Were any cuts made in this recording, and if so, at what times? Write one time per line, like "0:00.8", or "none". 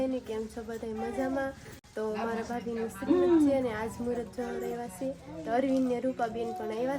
none